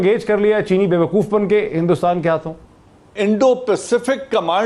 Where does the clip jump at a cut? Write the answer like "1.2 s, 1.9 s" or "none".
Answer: none